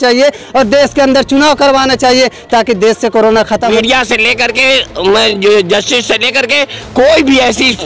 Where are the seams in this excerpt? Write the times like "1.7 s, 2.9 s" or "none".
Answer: 3.7 s